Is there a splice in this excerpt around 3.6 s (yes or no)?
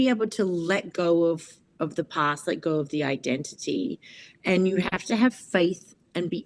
no